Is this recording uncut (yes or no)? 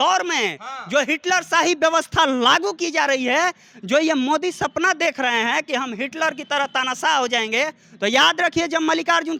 yes